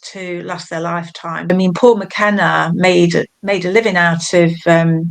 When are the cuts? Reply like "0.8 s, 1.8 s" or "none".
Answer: 1.5 s